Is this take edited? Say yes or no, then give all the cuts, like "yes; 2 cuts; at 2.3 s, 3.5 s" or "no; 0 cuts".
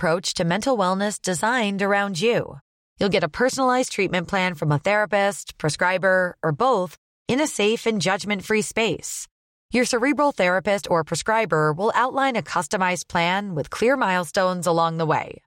no; 0 cuts